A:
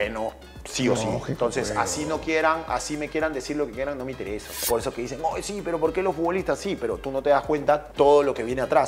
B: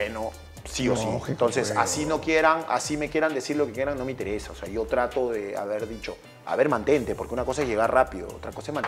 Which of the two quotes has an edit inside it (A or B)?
A